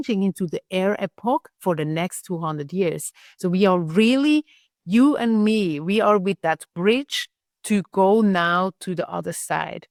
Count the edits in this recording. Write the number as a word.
zero